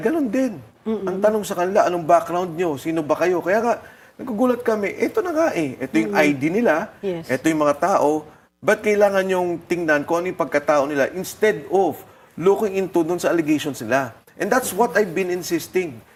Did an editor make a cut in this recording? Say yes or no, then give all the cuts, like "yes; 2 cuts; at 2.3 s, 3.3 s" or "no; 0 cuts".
no; 0 cuts